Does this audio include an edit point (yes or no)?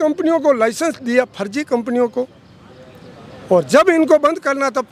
no